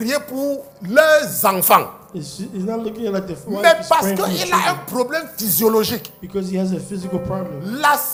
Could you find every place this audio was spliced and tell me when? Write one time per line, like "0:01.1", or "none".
none

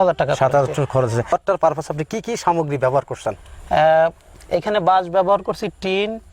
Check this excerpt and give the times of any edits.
0:01.3

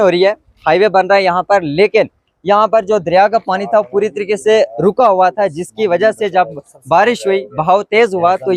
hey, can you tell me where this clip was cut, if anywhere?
none

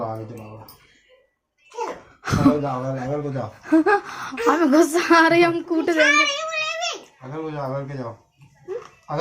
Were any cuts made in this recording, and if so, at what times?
none

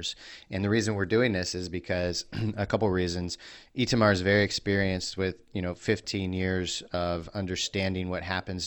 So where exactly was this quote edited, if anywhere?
none

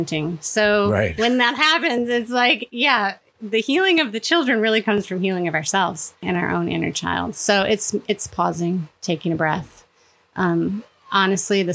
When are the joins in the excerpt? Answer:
0:06.2

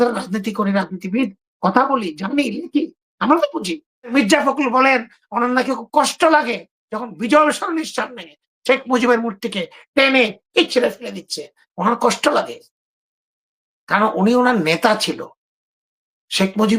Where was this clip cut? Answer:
0:04.1

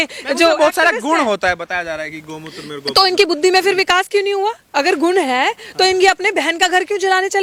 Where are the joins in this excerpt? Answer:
none

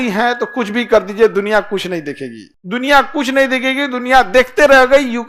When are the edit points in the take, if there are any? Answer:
none

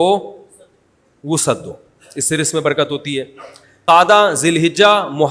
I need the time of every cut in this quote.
0:03.9

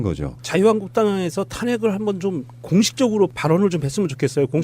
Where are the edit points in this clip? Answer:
0:02.9

